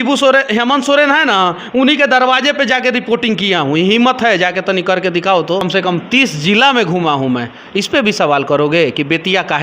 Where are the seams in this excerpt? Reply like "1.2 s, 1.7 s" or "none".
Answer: 5.7 s